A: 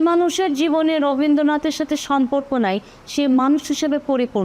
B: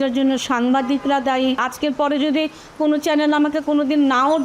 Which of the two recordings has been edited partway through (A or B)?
B